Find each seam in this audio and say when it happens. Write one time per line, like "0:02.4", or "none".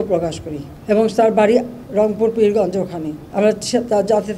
0:01.8
0:03.2